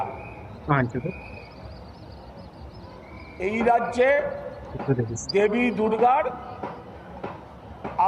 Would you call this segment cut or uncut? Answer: uncut